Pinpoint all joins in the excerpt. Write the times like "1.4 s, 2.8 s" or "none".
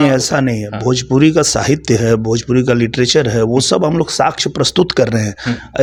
none